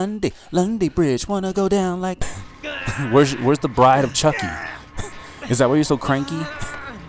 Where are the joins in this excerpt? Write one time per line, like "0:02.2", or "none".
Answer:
0:02.3